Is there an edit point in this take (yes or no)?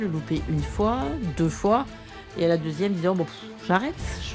no